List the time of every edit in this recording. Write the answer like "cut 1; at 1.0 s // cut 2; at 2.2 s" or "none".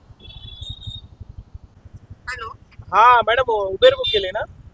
cut 1; at 1.8 s